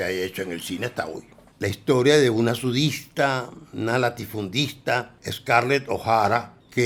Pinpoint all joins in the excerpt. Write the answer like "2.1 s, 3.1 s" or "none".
none